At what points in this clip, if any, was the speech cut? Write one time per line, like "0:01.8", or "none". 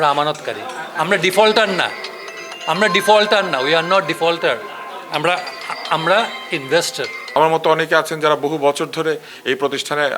0:07.4